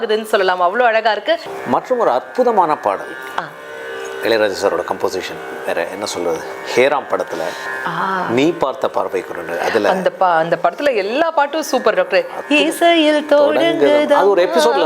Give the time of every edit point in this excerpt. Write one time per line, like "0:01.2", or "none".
0:01.5